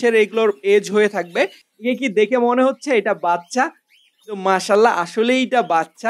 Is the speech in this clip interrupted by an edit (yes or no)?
yes